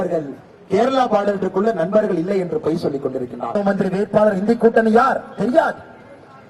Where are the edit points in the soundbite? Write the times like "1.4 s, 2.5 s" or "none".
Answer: 3.6 s